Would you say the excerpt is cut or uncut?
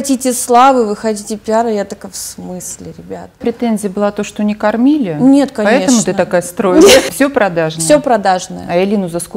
cut